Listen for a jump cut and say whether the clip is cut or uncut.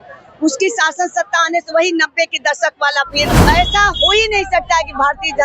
cut